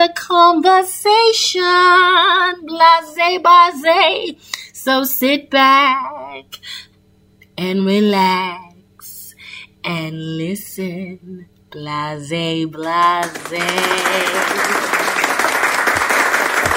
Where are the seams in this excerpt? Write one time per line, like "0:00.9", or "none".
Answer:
0:14.3